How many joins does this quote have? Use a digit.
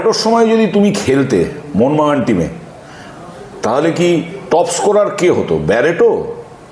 0